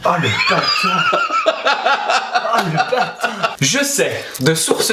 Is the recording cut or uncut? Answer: cut